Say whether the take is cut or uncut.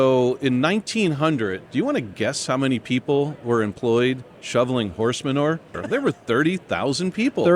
cut